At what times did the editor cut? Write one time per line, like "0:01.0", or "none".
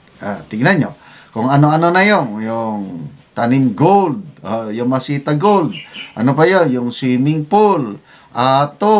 none